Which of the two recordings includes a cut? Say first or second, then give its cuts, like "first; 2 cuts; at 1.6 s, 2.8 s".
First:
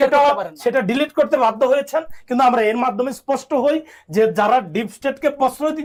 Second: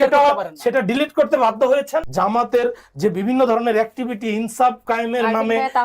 second; 1 cut; at 2.1 s